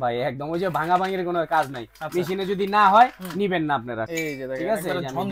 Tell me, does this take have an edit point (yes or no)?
yes